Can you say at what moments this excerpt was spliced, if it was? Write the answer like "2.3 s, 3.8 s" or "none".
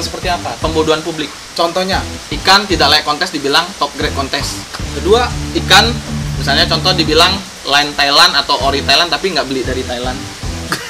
2.2 s, 4.8 s, 5.4 s